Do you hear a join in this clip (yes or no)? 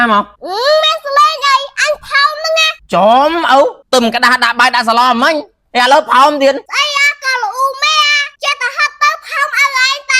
yes